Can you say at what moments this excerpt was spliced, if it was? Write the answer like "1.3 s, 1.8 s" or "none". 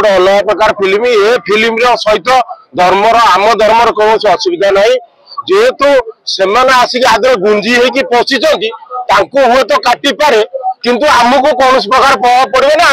none